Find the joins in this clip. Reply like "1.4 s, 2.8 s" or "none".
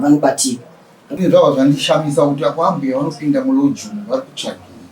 1.2 s